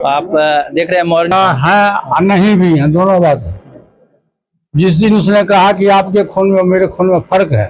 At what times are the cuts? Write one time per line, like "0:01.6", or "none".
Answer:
0:01.3